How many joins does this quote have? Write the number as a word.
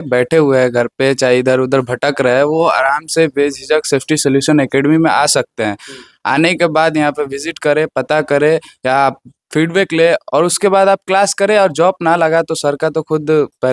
zero